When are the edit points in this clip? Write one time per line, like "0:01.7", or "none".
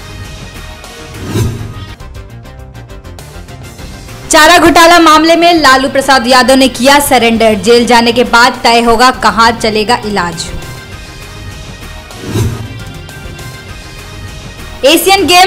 none